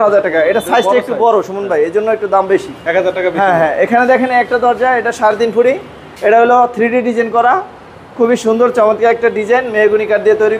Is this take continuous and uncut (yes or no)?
yes